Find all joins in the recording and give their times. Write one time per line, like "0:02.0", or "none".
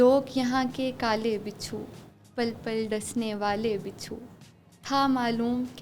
none